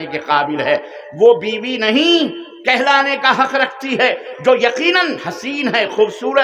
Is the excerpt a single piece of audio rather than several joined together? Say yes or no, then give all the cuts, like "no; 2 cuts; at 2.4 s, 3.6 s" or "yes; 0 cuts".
yes; 0 cuts